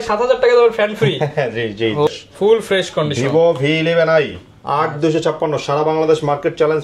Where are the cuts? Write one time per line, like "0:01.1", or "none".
0:02.1